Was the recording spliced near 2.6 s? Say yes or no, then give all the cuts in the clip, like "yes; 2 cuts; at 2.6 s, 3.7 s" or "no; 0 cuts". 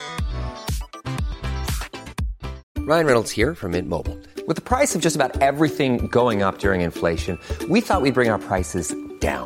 yes; 1 cut; at 2.6 s